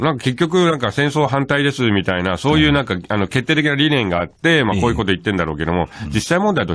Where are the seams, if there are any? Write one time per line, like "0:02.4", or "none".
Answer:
0:02.2